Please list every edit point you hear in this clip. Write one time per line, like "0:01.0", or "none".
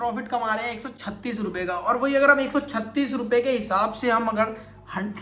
none